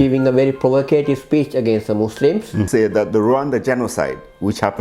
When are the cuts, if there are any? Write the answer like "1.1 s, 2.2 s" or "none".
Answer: 2.7 s

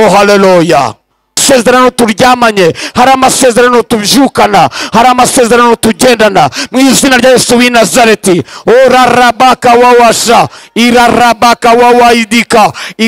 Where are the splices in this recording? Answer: 1.4 s

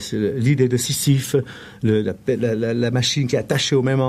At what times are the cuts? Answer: none

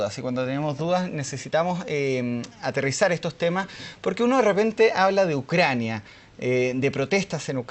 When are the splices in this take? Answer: 2.5 s

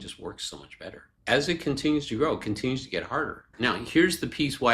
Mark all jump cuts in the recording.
1.1 s, 3.5 s

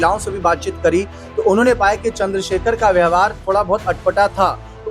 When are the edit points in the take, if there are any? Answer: none

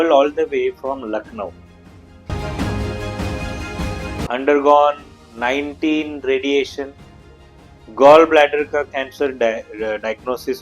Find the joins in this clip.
4.3 s

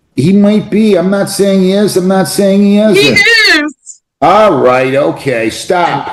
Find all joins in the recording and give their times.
none

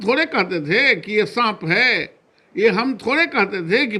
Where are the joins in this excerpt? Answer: none

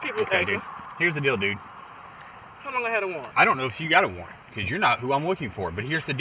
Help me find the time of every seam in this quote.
3.3 s

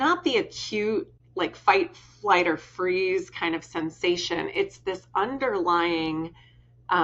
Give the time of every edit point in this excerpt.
1.2 s

